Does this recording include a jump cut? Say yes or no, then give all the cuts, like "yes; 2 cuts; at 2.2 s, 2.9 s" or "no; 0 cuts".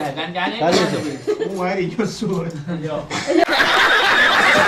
no; 0 cuts